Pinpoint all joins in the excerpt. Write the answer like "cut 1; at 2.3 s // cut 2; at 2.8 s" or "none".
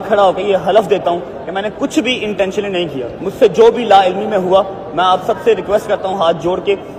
cut 1; at 3.1 s